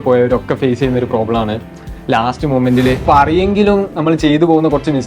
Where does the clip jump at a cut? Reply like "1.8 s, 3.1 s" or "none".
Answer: 3.0 s